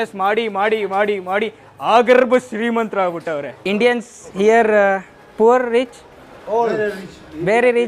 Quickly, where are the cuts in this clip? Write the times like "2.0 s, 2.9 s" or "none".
3.5 s